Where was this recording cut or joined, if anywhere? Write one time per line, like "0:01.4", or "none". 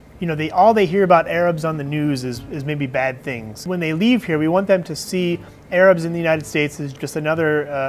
0:03.6
0:06.9